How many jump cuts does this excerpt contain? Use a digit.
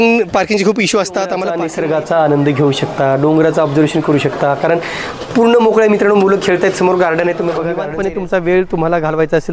2